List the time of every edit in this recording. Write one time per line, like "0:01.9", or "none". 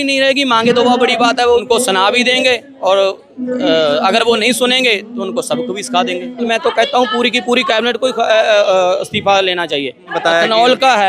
0:01.6
0:06.5
0:10.2